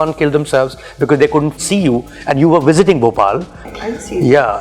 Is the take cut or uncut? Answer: cut